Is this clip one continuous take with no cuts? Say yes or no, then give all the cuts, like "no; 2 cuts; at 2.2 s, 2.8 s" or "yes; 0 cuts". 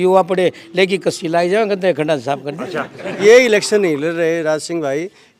no; 1 cut; at 3.1 s